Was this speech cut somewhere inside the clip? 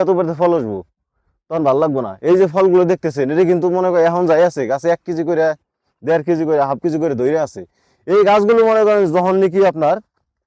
no; 0 cuts

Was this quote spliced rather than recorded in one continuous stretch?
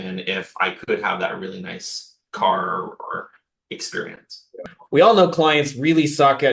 yes; 1 cut; at 4.8 s

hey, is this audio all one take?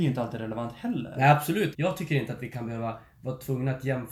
no; 1 cut; at 1.7 s

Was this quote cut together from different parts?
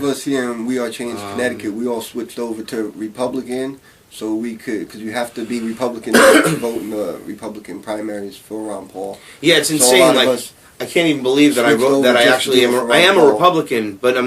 yes; 1 cut; at 7.8 s

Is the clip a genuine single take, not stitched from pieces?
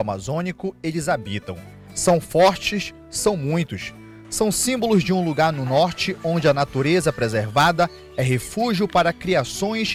yes; 0 cuts

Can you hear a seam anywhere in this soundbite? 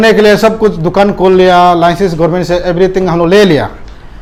no; 0 cuts

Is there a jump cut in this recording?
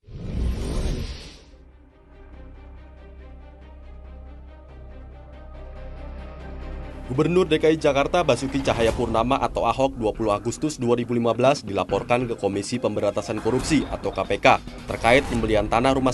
yes; 1 cut; at 1.3 s

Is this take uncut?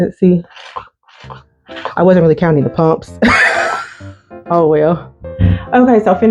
no; 1 cut; at 5.1 s

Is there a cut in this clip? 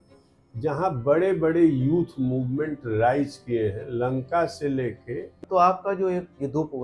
yes; 1 cut; at 5.4 s

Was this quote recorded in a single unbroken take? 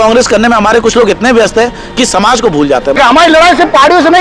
no; 1 cut; at 2.9 s

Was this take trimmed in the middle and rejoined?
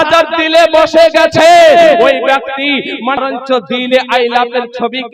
yes; 1 cut; at 3.2 s

